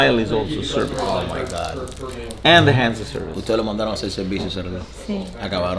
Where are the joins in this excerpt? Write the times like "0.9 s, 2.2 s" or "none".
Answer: none